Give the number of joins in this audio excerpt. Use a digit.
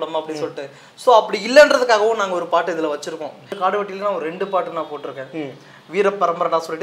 1